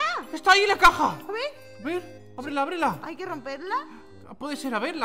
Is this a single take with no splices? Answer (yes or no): yes